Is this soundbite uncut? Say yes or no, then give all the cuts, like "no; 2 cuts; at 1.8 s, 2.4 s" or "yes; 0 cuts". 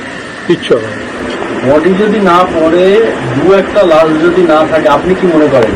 no; 1 cut; at 1.1 s